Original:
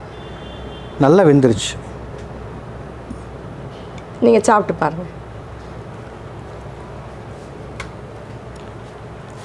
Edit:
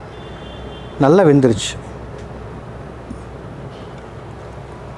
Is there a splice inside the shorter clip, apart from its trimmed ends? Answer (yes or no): yes